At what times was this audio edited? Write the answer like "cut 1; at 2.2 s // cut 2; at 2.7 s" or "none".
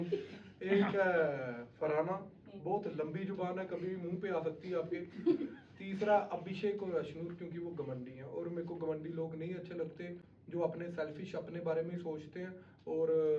none